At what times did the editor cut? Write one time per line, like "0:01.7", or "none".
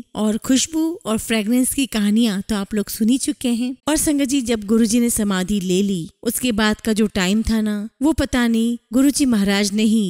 0:03.8